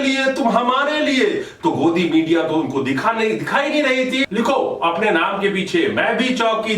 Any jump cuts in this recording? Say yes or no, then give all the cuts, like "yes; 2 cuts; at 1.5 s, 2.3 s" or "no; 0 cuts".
yes; 1 cut; at 4.3 s